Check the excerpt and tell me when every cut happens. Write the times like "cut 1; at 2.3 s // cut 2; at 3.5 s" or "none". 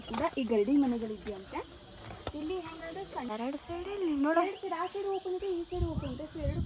cut 1; at 3.3 s